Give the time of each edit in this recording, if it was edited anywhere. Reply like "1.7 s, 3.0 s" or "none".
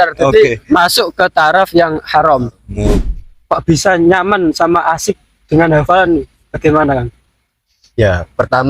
3.1 s

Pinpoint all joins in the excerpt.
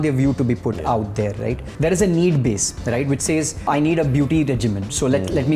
1.7 s, 3.7 s

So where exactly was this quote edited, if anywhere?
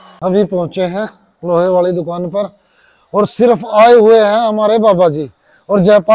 none

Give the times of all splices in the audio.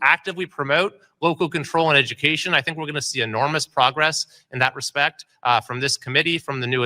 1.0 s

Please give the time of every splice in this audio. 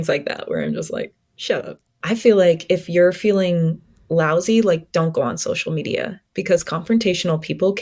2.0 s

